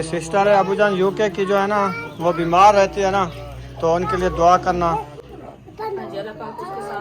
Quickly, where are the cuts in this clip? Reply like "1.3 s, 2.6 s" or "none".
none